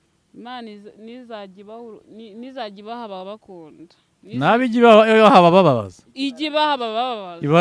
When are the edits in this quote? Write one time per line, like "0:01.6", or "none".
none